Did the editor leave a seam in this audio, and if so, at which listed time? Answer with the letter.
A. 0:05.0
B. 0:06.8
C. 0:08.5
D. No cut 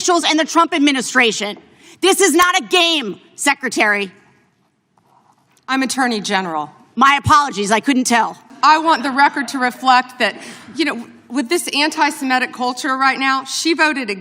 C